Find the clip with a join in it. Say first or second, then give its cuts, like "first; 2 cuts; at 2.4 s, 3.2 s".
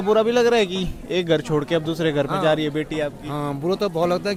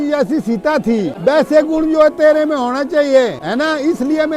second; 2 cuts; at 1.1 s, 3.4 s